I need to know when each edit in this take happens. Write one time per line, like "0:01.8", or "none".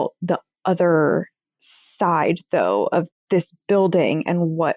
none